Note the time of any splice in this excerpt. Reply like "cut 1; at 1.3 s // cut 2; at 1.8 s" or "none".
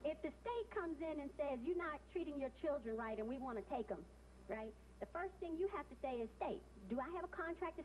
none